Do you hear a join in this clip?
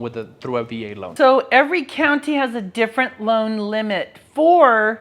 yes; 1 cut; at 1.1 s

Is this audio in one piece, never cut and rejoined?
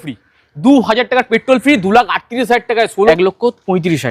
no; 1 cut; at 3.1 s

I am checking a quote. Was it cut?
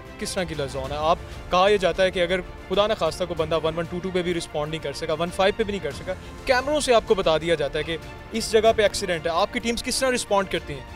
no; 0 cuts

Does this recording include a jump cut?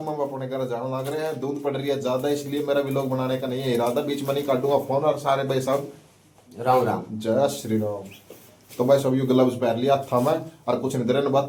no; 0 cuts

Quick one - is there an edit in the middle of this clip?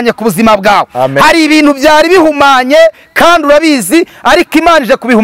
no; 0 cuts

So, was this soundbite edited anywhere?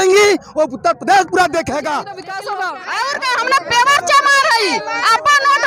yes; 1 cut; at 2.3 s

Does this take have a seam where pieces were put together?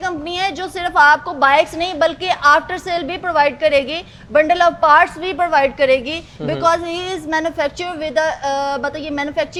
no; 0 cuts

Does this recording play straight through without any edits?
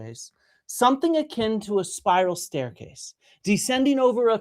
yes; 0 cuts

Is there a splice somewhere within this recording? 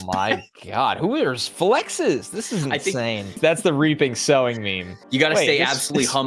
yes; 2 cuts; at 3.3 s, 5.0 s

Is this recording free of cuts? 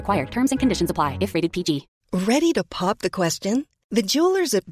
no; 1 cut; at 1.9 s

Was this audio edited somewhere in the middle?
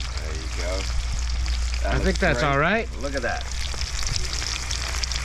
no; 0 cuts

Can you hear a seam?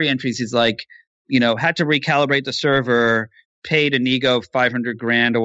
no; 0 cuts

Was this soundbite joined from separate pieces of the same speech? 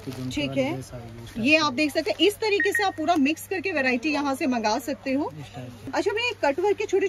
yes; 1 cut; at 5.8 s

